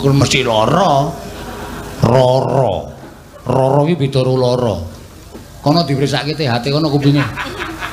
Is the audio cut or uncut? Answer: uncut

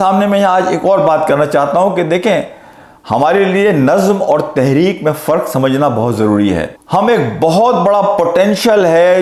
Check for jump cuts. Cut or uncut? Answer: uncut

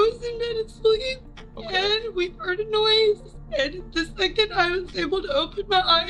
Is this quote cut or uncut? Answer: uncut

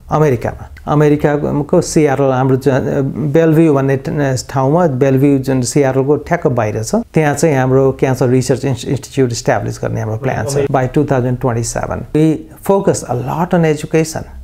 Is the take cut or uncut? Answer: cut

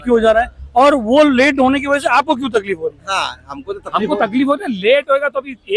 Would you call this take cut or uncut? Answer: uncut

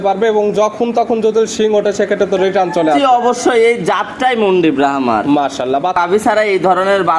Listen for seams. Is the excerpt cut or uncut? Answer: cut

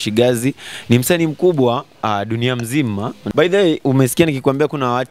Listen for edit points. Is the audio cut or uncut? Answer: cut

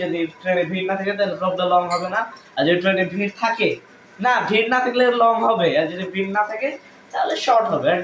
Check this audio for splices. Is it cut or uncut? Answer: uncut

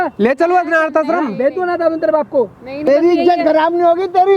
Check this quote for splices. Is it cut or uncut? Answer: cut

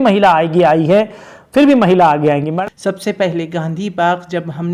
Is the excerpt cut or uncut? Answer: cut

